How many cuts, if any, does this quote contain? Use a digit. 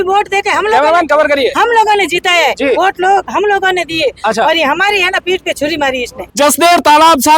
1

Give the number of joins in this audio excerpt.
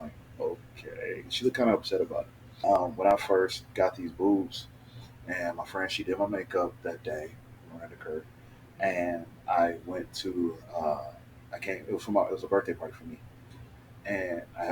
1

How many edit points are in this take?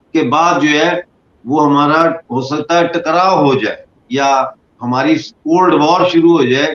0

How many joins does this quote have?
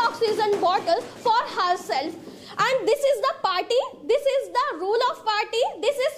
0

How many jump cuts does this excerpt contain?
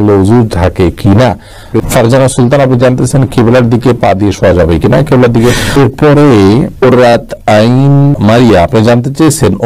2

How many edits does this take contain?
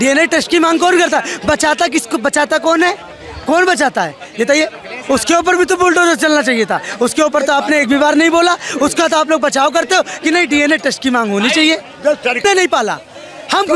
1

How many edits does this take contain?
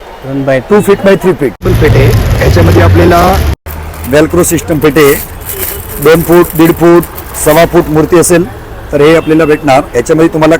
1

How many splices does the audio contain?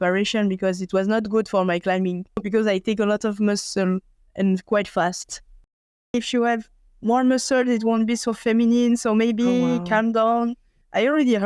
2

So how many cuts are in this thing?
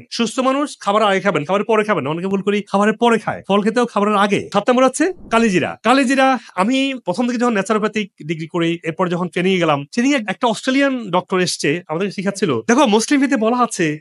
1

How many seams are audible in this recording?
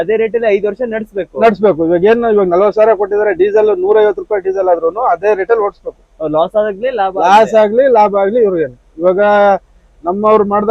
0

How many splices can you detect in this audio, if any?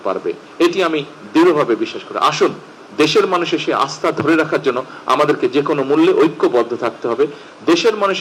0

